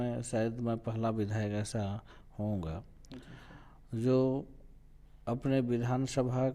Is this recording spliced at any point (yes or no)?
no